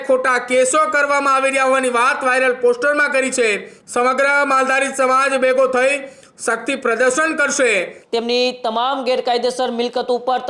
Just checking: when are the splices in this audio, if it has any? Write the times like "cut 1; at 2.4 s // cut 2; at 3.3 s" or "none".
cut 1; at 3.7 s // cut 2; at 8.0 s